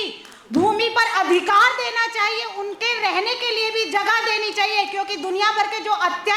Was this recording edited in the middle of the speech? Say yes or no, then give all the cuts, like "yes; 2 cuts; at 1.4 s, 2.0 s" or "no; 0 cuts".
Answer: no; 0 cuts